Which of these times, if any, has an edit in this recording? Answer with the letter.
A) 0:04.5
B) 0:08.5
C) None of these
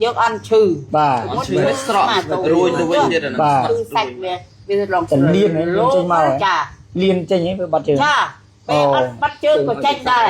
C